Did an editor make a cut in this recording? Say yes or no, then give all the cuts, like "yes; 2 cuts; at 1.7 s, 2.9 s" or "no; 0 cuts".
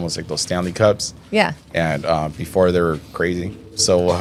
no; 0 cuts